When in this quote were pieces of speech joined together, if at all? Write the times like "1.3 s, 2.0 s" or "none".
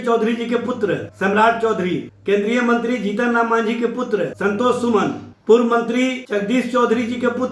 1.1 s, 2.1 s, 4.3 s, 5.3 s, 6.2 s

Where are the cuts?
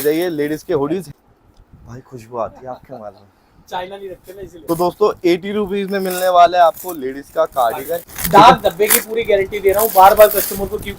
1.1 s, 4.6 s, 8.1 s

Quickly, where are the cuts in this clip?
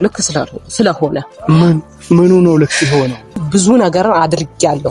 3.4 s

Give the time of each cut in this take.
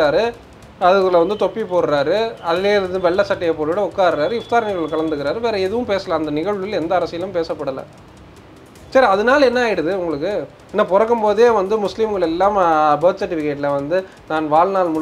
none

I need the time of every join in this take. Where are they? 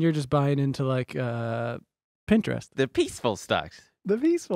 2.7 s

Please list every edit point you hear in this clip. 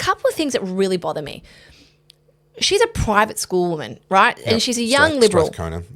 none

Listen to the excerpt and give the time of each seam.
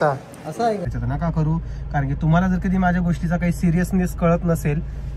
0.9 s

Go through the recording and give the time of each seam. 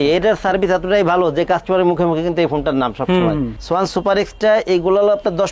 none

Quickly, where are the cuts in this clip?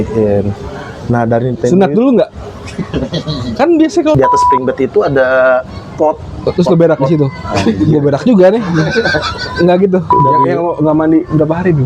4.1 s, 10.2 s

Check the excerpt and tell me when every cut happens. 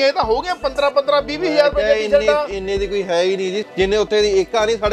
3.6 s

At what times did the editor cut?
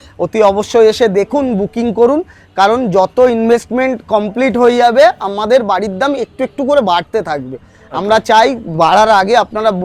none

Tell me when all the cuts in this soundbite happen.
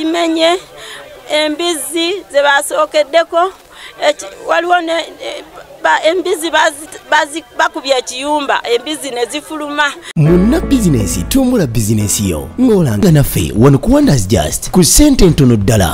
10.1 s

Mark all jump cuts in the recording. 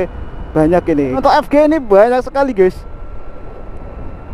1.2 s

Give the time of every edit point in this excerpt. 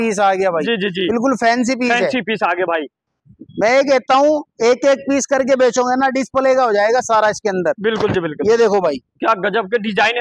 none

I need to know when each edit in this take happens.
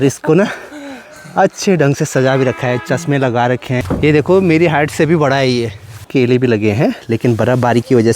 3.8 s, 6.0 s

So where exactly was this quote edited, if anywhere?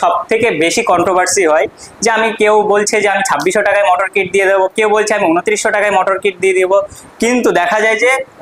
none

